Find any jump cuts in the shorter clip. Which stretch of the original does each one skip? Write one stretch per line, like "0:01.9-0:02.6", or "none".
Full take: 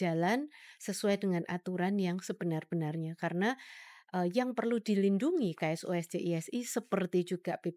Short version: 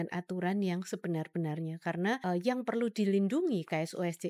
0:03.6-0:04.1